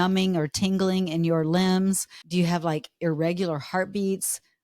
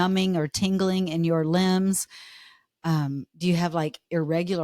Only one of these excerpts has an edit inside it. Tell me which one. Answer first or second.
first